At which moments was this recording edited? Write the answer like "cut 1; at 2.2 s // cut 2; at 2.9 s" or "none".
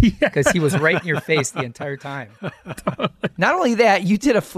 cut 1; at 3.3 s